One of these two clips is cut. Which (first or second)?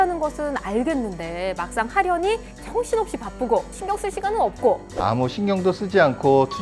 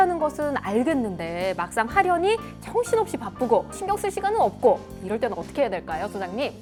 first